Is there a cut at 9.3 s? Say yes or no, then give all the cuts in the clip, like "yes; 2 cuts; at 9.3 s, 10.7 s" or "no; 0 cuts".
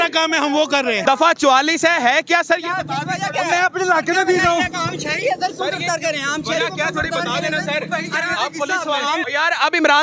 yes; 2 cuts; at 1.0 s, 9.3 s